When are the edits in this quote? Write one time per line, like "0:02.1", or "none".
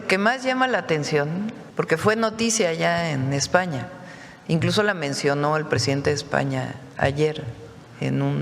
0:01.6